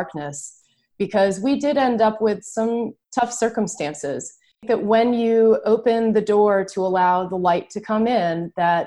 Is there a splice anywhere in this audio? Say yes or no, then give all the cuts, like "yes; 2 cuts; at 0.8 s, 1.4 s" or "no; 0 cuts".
yes; 2 cuts; at 3.0 s, 4.7 s